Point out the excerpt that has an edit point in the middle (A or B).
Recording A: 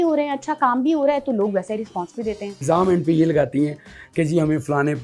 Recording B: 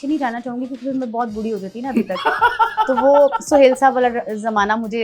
A